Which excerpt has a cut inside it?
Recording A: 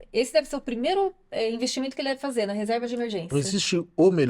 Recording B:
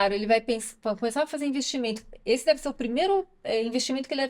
A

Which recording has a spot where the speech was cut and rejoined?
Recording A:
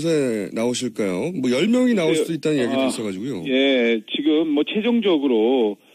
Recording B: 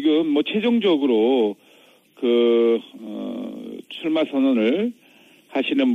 A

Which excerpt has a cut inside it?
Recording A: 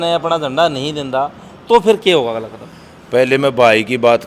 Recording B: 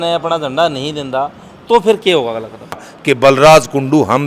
B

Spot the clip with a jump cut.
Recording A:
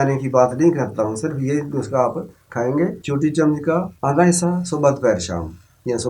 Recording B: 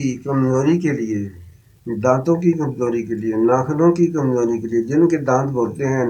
A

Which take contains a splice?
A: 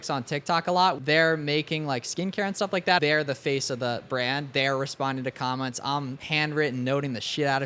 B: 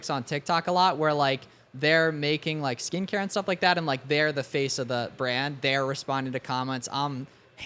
A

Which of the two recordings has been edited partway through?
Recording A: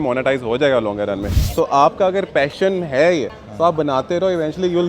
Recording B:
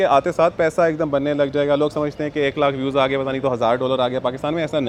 A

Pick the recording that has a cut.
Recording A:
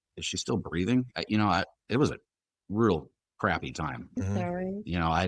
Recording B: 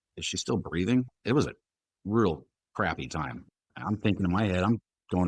B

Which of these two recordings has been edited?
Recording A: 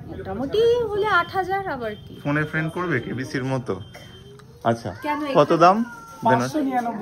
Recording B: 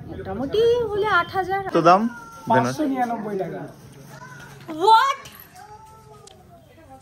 B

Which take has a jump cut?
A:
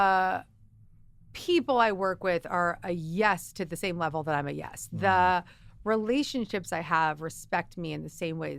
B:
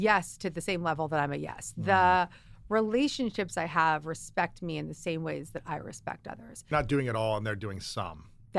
B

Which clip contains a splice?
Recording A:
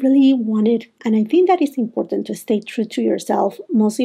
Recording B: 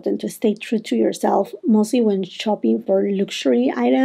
A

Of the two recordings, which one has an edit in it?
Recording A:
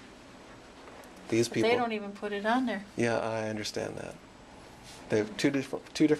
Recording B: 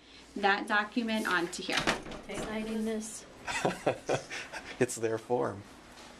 B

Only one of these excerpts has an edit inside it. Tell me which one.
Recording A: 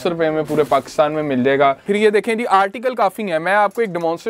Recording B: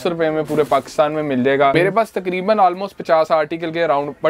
B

